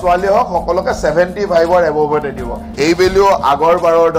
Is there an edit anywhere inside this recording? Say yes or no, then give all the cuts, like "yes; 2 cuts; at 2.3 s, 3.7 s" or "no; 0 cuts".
yes; 1 cut; at 2.7 s